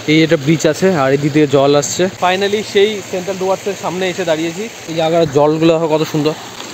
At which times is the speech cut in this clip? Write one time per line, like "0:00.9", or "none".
none